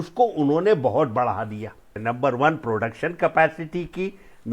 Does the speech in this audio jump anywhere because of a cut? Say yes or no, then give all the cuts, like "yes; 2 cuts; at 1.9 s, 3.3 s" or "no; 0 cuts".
yes; 1 cut; at 1.9 s